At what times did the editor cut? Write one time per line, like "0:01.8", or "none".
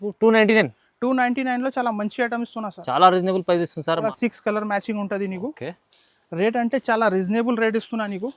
0:04.0

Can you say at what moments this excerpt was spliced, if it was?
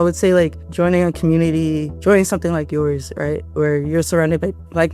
none

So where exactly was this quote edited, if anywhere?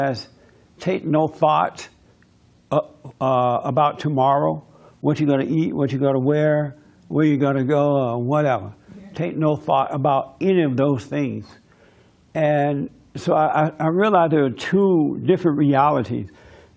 none

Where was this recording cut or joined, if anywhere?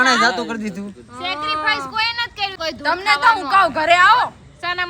0:02.6

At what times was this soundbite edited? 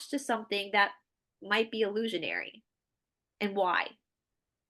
none

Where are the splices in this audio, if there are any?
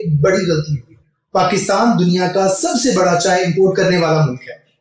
0:01.0

